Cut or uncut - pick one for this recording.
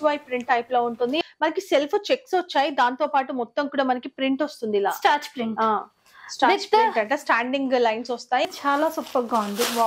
cut